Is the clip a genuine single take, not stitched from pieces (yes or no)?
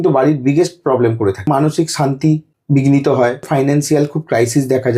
no